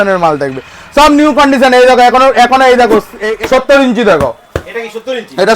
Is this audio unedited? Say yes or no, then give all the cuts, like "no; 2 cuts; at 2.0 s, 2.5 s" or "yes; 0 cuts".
no; 1 cut; at 3.2 s